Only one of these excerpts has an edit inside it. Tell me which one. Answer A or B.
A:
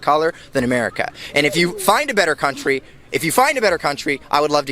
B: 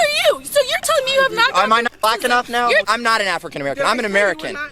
B